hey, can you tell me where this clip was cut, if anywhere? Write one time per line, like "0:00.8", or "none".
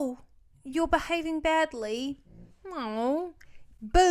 none